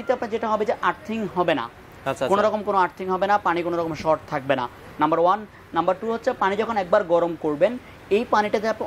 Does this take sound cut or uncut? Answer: uncut